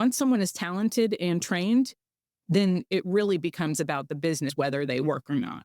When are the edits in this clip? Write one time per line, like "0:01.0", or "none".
0:04.5